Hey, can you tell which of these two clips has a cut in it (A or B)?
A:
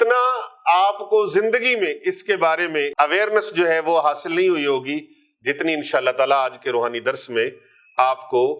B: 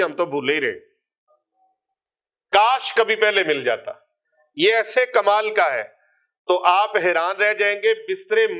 A